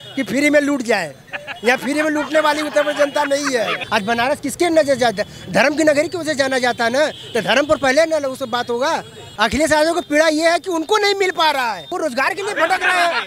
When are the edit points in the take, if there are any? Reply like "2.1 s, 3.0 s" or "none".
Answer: 3.8 s, 9.2 s, 11.9 s